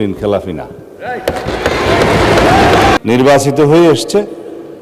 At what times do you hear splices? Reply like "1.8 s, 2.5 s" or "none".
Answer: 3.0 s